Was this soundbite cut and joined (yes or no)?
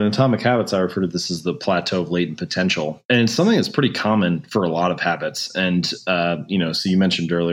yes